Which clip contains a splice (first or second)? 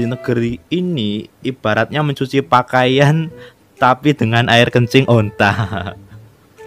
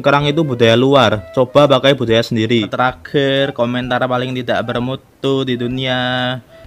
second